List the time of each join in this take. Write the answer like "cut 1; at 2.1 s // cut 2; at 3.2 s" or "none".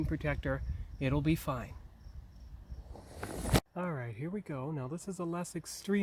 cut 1; at 3.6 s